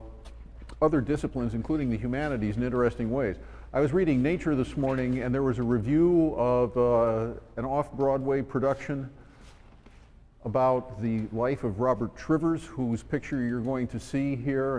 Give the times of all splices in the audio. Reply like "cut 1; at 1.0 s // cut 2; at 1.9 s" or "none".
none